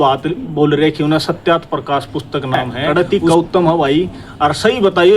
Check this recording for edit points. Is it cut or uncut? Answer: cut